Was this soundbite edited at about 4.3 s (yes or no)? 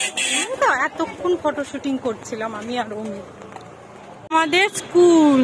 yes